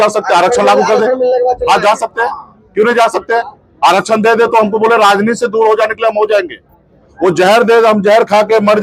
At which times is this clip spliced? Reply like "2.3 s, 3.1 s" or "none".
none